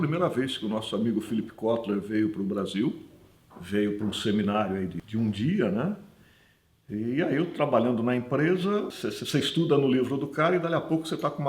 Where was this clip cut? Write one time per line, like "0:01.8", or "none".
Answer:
0:05.0
0:08.9